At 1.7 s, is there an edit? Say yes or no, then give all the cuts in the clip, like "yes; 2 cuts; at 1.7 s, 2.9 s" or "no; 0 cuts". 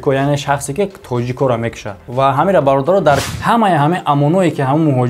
no; 1 cut; at 3.3 s